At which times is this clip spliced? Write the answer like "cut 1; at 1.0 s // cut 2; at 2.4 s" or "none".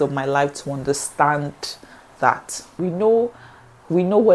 cut 1; at 2.8 s